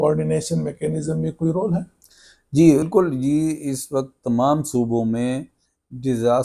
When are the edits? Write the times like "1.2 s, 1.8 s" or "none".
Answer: 2.9 s